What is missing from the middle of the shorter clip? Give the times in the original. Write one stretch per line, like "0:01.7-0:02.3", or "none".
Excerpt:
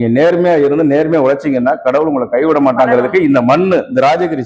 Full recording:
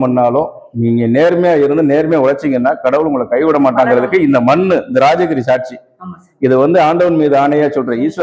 none